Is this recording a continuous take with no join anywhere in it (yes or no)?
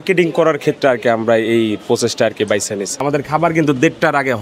no